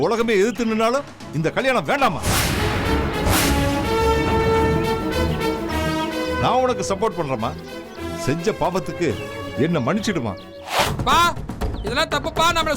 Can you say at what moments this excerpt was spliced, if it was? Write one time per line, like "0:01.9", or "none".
0:10.8